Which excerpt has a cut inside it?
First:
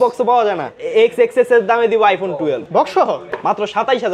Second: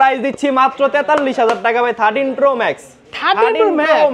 first; 2 cuts; at 0.8 s, 2.8 s

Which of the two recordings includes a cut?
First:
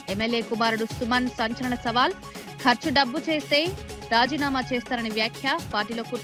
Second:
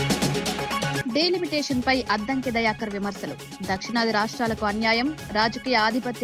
second; 1 cut; at 1.0 s

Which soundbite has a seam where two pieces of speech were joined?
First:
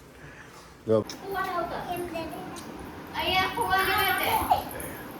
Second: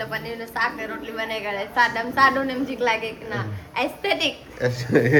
first; 1 cut; at 1.0 s

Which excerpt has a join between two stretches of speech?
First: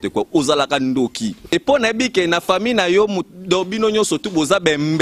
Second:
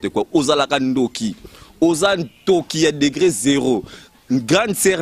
first; 1 cut; at 1.4 s

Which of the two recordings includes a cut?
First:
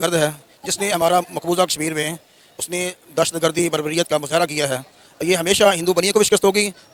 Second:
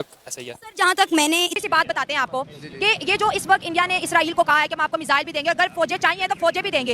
second; 1 cut; at 1.6 s

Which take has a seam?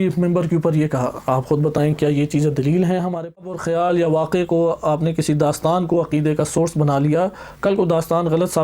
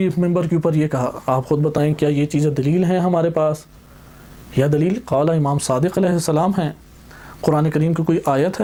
first; 1 cut; at 3.4 s

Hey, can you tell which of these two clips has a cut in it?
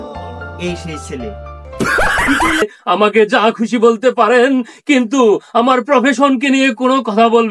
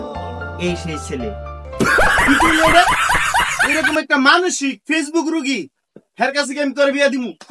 first; 1 cut; at 2.6 s

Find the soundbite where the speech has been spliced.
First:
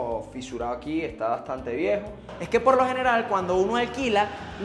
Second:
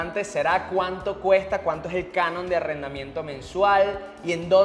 first; 1 cut; at 2.3 s

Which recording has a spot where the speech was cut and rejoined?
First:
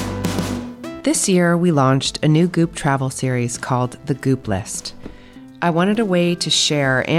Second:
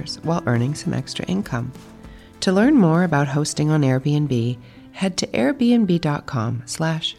first; 1 cut; at 1.0 s

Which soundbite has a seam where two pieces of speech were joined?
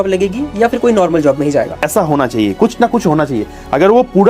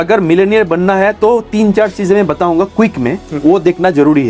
first; 1 cut; at 1.8 s

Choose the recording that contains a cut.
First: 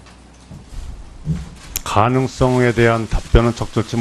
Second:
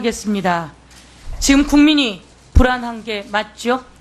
first; 1 cut; at 1.4 s

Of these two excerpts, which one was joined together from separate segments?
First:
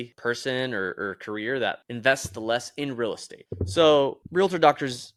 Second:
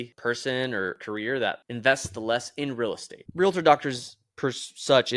second; 2 cuts; at 1.0 s, 3.2 s

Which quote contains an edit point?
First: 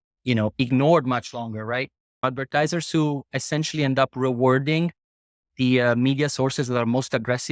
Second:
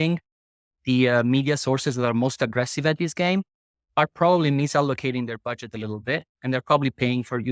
first; 1 cut; at 2.3 s

